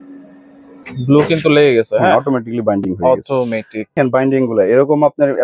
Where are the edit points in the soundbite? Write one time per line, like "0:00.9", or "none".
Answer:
0:00.8
0:03.9